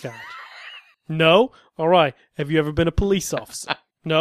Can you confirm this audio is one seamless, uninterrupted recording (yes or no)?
yes